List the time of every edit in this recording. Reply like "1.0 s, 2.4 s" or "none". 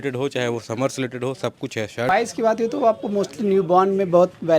2.1 s